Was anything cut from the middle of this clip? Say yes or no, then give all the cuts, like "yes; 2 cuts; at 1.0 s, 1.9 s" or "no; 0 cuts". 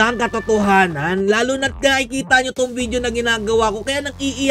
no; 0 cuts